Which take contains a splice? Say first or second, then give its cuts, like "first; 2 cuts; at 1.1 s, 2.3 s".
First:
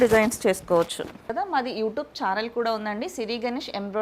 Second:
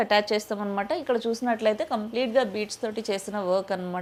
first; 1 cut; at 1.3 s